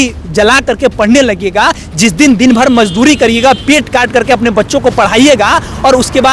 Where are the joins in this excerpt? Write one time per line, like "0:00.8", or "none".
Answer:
none